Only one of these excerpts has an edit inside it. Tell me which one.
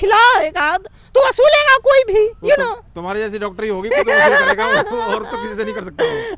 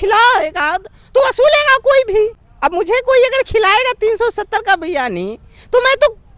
second; 1 cut; at 2.4 s

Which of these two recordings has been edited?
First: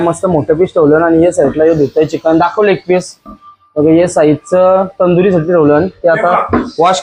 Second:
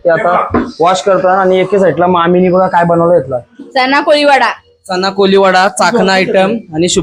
second; 1 cut; at 3.6 s

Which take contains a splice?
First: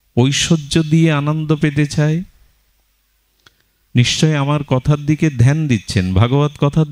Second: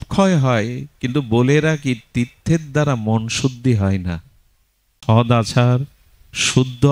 second; 1 cut; at 5.0 s

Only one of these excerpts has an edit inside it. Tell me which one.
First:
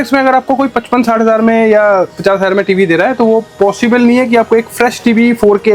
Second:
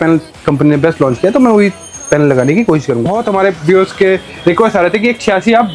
second; 1 cut; at 3.1 s

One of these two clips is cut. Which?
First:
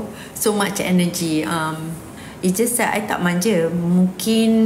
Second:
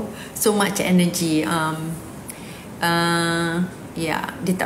first; 1 cut; at 2.2 s

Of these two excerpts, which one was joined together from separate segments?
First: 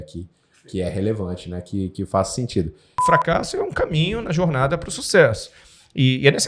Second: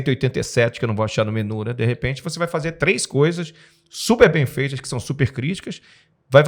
first; 1 cut; at 3.0 s

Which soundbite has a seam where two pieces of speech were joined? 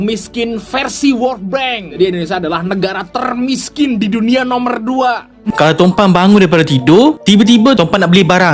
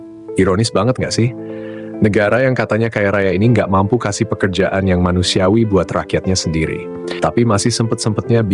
first; 2 cuts; at 1.9 s, 5.5 s

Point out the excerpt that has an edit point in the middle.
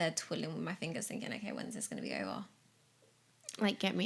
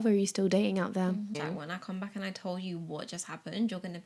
second; 1 cut; at 1.4 s

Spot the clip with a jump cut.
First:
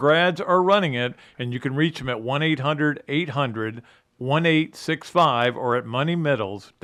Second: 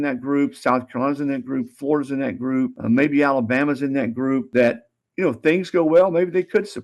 second; 2 cuts; at 2.8 s, 4.5 s

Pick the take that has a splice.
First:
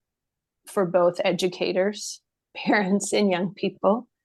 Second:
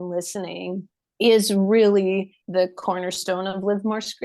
second; 1 cut; at 2.4 s

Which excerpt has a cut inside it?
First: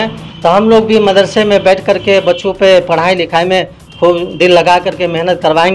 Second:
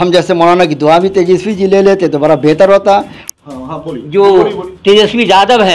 second; 1 cut; at 3.2 s

